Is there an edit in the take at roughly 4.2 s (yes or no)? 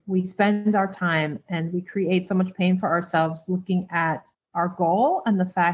no